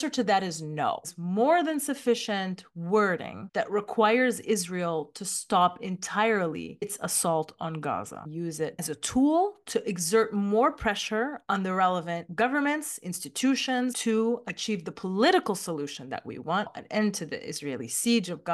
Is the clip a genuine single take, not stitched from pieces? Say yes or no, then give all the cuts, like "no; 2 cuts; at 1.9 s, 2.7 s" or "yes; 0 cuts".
no; 4 cuts; at 1.1 s, 8.6 s, 14.0 s, 16.8 s